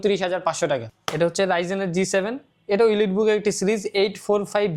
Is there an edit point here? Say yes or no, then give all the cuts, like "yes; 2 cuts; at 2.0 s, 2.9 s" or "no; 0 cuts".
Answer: yes; 1 cut; at 0.9 s